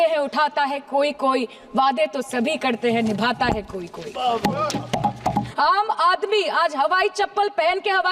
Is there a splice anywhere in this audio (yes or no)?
yes